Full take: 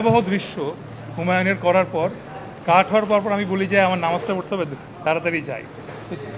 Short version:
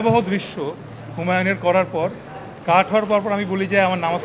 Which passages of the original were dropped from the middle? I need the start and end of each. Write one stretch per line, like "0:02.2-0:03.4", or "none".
none

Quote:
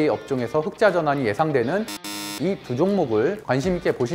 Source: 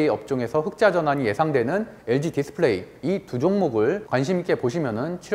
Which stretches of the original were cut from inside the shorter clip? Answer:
0:02.1-0:02.7

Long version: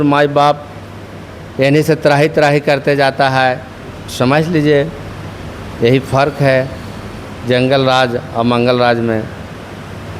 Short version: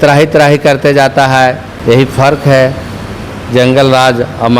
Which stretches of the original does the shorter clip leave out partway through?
0:03.7-0:05.6

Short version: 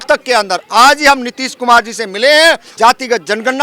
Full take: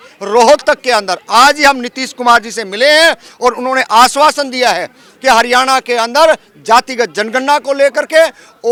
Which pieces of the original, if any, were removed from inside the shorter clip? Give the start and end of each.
0:03.2-0:06.5

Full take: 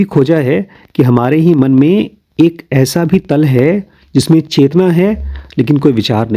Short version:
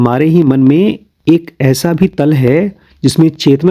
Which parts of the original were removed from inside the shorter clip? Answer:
none

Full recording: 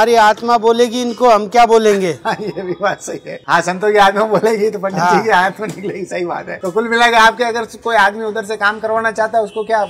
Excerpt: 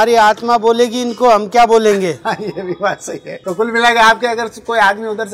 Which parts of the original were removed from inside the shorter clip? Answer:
0:03.3-0:06.5

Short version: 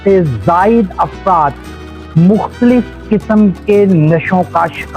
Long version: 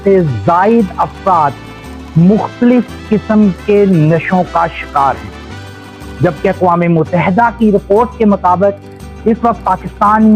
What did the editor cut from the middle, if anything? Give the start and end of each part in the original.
none

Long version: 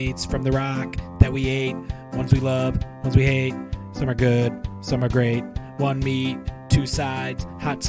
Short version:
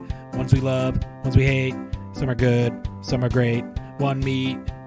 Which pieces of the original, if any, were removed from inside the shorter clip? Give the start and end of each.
none

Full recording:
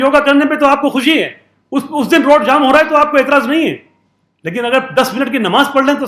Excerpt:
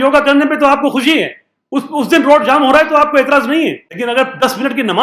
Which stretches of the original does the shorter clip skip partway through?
0:03.9-0:04.4

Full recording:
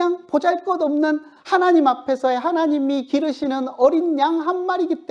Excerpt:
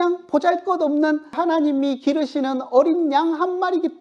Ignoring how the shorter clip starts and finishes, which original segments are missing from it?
0:01.4-0:02.4

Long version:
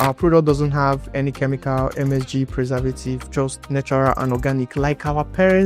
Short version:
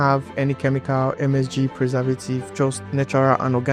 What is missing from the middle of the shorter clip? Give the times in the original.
none

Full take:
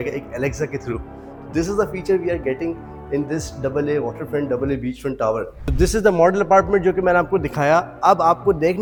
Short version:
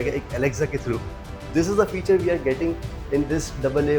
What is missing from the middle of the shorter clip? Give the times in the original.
none

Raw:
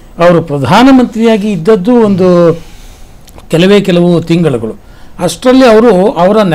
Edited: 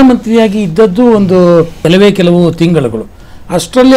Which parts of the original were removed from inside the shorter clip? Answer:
0:02.6-0:03.4

